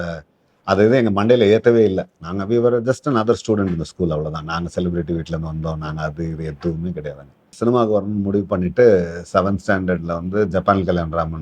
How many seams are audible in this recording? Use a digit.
1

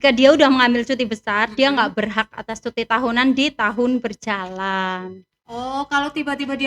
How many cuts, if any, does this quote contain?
0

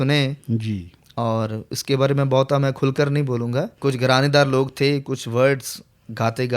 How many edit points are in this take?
1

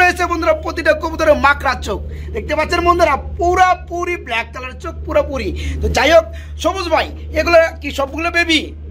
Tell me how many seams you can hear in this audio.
0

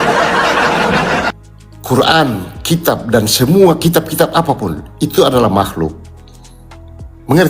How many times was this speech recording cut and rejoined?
1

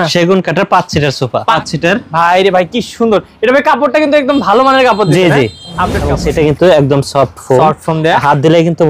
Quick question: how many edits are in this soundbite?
2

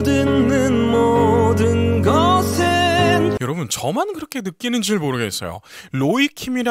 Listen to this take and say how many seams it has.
1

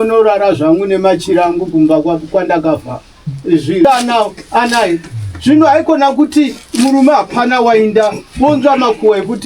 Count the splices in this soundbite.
1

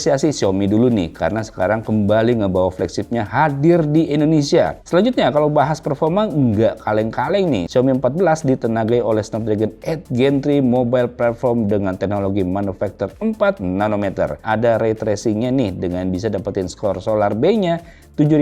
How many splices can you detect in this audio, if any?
2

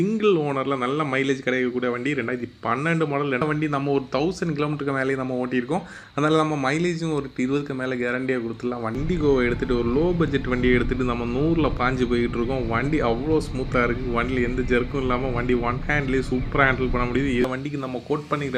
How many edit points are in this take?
3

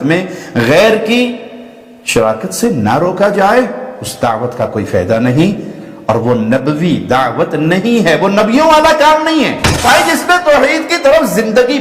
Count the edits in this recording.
1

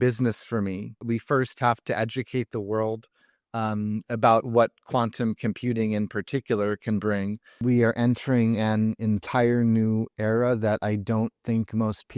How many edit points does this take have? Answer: 2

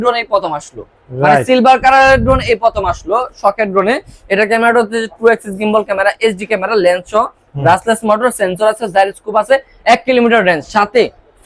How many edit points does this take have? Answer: 0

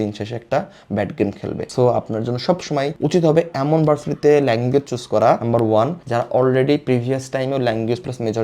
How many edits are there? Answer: 1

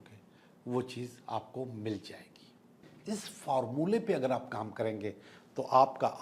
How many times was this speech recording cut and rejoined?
1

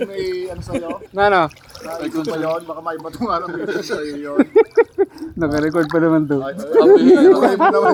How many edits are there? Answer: 0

